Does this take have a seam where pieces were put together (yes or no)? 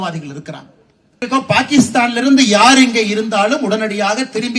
yes